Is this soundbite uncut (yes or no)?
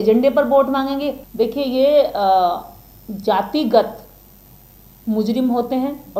no